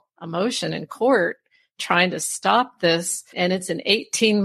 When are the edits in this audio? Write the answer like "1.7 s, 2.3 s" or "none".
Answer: 3.3 s